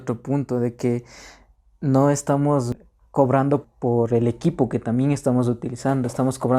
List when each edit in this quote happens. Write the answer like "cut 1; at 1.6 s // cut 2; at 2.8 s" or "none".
cut 1; at 2.7 s // cut 2; at 3.7 s